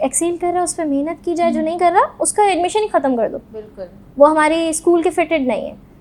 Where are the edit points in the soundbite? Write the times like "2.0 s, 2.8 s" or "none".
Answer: none